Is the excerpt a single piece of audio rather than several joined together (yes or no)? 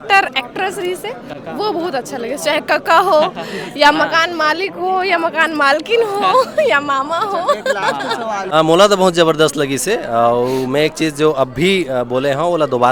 yes